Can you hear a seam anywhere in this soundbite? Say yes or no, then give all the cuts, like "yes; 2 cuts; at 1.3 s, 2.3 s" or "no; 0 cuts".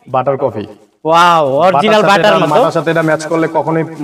no; 0 cuts